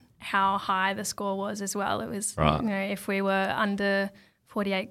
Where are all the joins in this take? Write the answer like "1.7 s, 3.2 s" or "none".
none

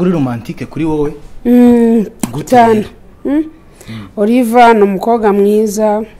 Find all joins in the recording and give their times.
none

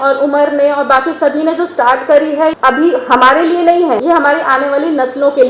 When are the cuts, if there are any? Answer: 2.6 s, 4.0 s

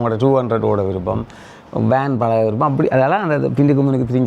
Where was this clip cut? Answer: none

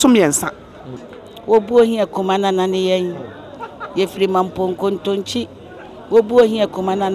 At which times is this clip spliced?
0.9 s

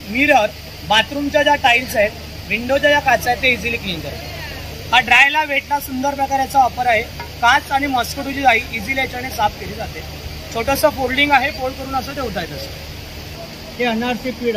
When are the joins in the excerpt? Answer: 13.3 s

